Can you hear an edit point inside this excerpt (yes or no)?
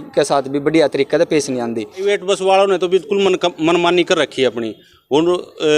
yes